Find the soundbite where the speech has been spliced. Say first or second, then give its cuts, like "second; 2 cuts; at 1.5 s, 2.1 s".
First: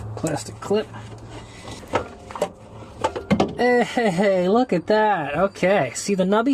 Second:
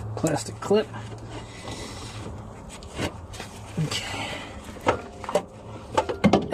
first; 1 cut; at 1.7 s